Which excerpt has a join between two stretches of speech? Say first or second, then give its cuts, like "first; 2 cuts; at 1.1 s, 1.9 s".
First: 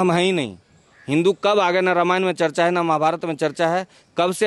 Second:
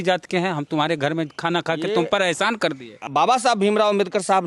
second; 1 cut; at 3.0 s